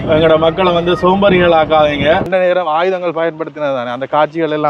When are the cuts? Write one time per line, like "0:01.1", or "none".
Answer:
0:02.3